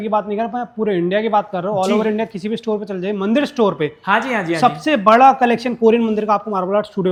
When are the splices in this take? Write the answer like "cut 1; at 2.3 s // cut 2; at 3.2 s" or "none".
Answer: none